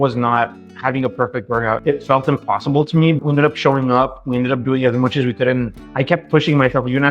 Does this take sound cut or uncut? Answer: cut